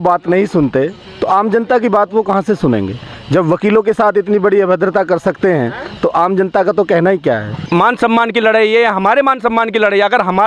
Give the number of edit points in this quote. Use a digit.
1